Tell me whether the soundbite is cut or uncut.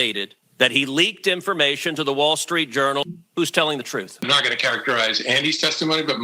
cut